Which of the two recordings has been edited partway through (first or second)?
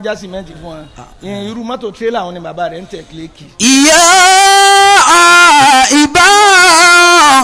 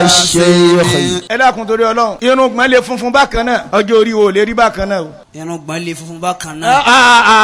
second